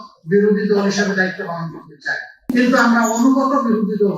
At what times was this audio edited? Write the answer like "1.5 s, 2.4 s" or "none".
2.5 s